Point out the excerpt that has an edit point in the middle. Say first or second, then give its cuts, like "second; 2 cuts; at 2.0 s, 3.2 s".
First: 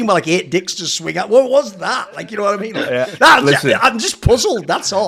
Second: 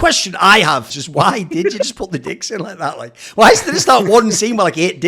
second; 1 cut; at 0.9 s